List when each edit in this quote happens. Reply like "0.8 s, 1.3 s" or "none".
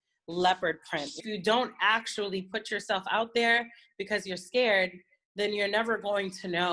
1.2 s